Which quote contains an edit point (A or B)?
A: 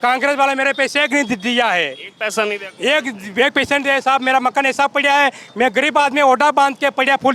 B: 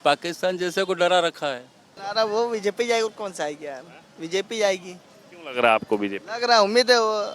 B